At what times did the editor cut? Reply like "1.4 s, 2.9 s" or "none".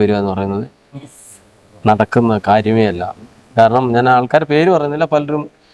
none